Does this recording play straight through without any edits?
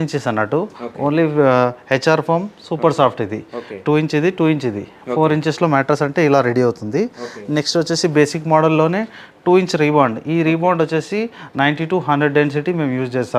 yes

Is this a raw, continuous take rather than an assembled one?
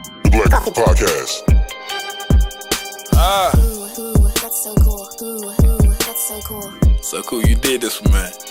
yes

